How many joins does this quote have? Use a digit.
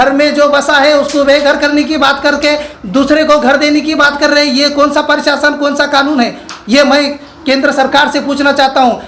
0